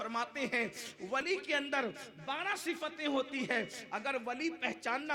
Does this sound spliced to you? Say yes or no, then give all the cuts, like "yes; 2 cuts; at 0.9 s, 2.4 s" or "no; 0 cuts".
yes; 1 cut; at 1.2 s